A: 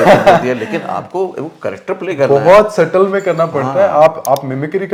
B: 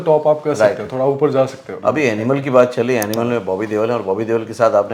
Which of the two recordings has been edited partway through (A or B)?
B